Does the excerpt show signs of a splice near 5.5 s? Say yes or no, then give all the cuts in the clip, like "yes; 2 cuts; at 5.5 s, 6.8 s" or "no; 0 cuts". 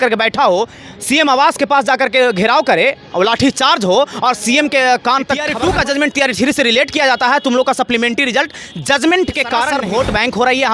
yes; 2 cuts; at 5.5 s, 9.7 s